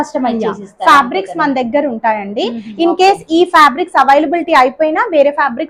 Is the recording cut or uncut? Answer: uncut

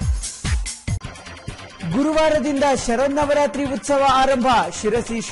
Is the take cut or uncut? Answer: cut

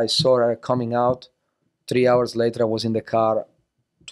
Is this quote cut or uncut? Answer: uncut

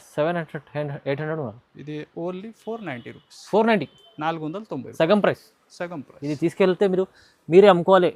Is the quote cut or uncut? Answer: uncut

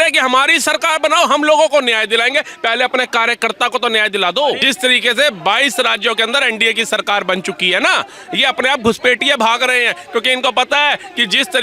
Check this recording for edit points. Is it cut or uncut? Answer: cut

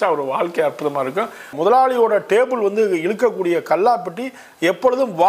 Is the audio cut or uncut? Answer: cut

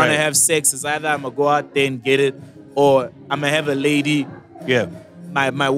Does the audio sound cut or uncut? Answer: uncut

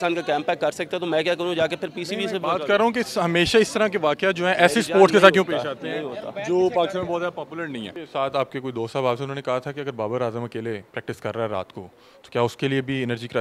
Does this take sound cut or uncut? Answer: cut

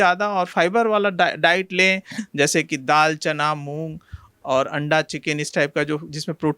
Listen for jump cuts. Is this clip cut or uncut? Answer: uncut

